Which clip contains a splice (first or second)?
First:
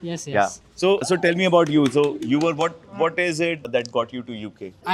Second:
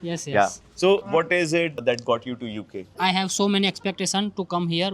second